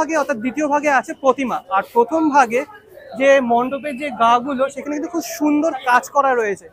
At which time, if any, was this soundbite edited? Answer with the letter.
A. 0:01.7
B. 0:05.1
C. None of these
C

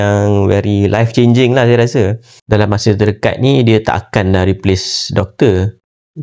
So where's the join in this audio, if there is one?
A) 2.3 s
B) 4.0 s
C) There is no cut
A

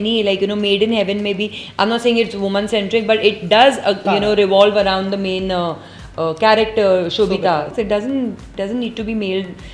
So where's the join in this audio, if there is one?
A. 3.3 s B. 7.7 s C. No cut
B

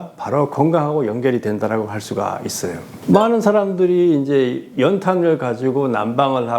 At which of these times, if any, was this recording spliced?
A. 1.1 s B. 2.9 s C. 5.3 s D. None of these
B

